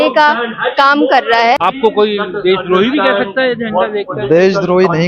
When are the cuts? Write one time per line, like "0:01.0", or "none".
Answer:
0:01.6